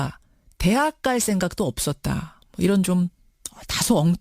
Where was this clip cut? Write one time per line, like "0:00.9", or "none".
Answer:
0:02.5